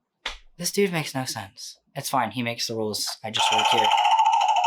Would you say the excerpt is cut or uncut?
uncut